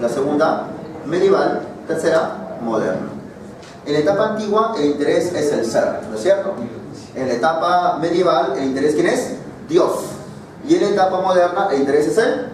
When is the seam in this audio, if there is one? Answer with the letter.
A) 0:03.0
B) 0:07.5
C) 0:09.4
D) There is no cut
C